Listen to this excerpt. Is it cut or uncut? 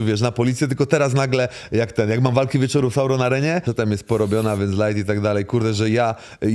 cut